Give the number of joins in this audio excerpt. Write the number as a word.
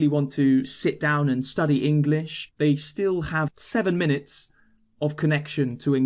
two